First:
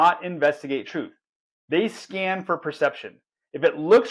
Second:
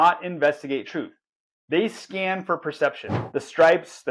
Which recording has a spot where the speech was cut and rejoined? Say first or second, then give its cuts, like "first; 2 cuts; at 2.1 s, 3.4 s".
second; 1 cut; at 3.1 s